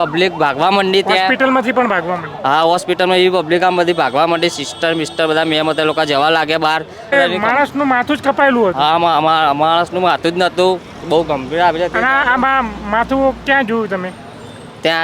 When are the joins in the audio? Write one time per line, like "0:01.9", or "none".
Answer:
0:07.1